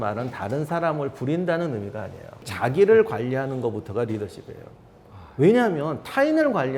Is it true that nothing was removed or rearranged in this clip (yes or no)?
no